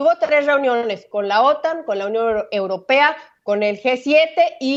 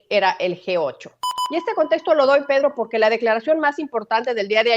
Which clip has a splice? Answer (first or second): second